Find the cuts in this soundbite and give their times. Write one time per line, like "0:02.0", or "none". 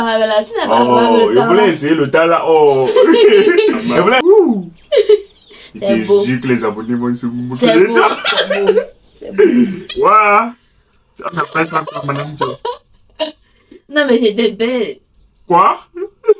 0:04.2
0:10.0